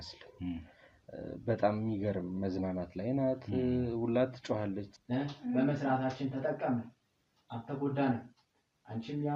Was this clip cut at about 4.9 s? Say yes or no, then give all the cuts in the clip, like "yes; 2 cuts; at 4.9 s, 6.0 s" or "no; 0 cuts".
yes; 1 cut; at 4.9 s